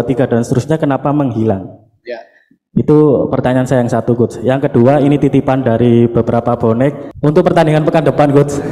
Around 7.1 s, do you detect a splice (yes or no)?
yes